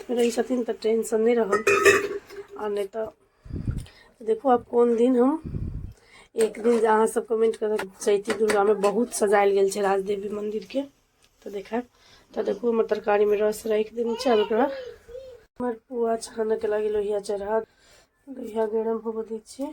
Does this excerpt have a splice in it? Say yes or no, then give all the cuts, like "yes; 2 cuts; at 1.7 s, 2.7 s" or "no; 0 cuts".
yes; 1 cut; at 7.8 s